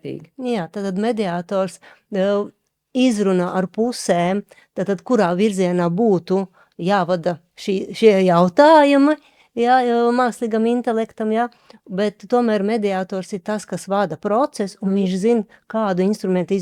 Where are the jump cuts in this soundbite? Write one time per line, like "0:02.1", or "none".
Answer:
none